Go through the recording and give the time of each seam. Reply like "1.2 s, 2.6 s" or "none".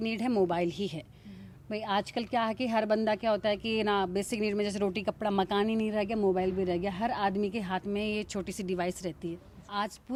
none